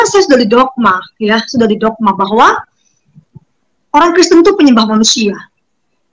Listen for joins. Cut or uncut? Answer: uncut